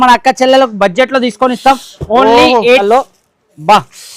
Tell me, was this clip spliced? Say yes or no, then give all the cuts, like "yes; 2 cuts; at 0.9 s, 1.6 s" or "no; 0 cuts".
yes; 1 cut; at 2.8 s